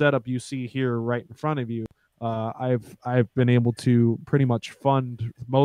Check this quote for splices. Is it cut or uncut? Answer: uncut